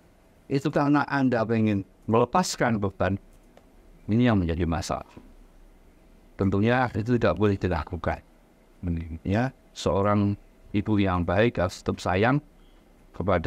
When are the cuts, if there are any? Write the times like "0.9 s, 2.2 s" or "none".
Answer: none